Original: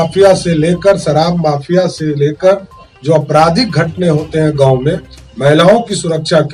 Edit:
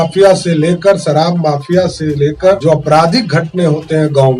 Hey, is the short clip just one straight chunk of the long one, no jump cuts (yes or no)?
no